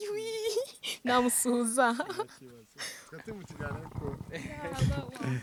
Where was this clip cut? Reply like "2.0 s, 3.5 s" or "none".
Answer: none